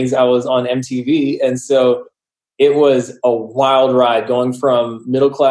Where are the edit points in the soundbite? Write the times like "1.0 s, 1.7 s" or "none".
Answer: 3.1 s